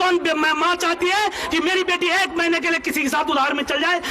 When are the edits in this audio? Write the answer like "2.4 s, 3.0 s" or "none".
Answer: none